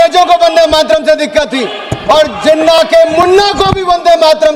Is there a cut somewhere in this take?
no; 0 cuts

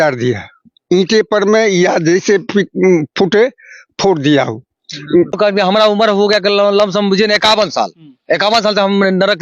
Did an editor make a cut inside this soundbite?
yes; 1 cut; at 5.4 s

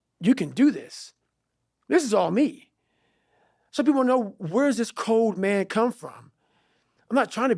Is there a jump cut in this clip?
no; 0 cuts

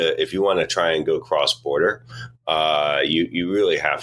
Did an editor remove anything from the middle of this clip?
no; 0 cuts

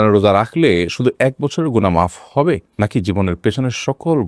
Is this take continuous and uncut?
yes; 0 cuts

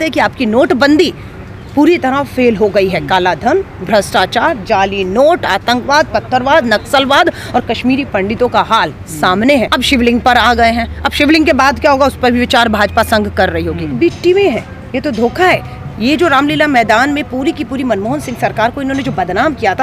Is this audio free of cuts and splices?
no; 2 cuts; at 9.7 s, 13.9 s

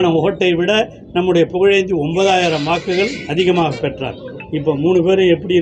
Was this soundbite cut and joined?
no; 0 cuts

